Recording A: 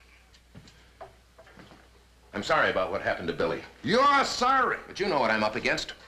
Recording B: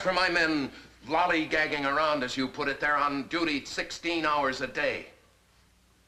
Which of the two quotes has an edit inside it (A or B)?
A